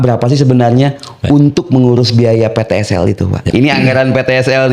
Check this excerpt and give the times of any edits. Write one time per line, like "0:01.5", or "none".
0:03.5